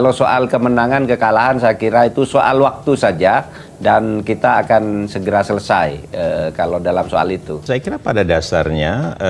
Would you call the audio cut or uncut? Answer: uncut